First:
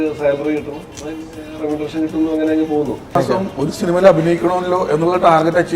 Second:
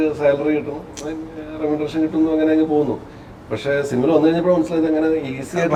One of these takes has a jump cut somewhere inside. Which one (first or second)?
first